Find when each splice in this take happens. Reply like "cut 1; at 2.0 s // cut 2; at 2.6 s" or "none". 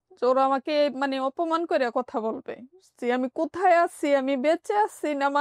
cut 1; at 2.9 s

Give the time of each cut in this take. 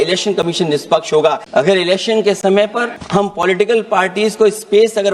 cut 1; at 1.4 s // cut 2; at 3.0 s

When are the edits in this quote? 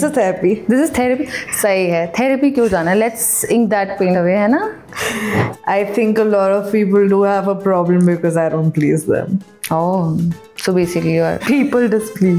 cut 1; at 5.5 s // cut 2; at 11.4 s

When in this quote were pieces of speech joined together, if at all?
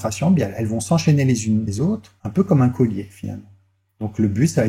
cut 1; at 1.7 s

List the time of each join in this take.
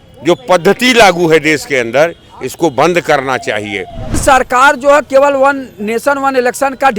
cut 1; at 4.2 s

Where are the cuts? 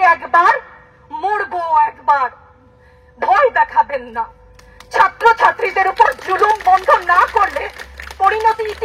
none

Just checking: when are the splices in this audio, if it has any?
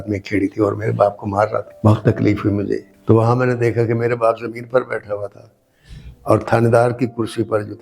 cut 1; at 1.7 s // cut 2; at 2.9 s

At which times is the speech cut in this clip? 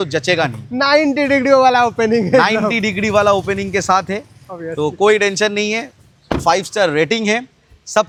none

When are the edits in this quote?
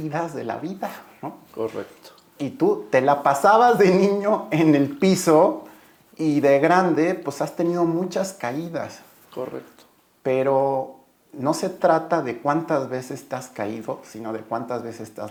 none

